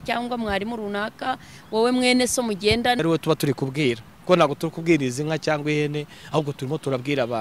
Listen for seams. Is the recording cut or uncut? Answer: cut